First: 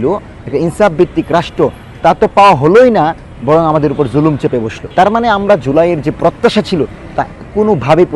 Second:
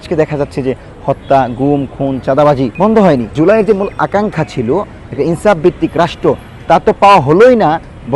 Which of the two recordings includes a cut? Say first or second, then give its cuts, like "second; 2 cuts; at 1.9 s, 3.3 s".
second; 1 cut; at 3.3 s